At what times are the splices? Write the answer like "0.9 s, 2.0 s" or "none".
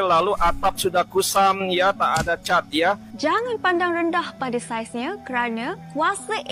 3.1 s